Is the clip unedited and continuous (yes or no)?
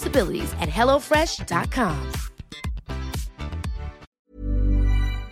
no